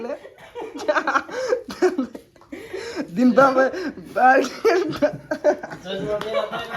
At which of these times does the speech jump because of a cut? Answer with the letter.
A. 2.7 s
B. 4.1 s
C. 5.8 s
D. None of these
D